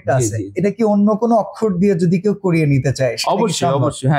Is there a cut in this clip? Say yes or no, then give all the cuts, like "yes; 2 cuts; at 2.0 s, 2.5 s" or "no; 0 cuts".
no; 0 cuts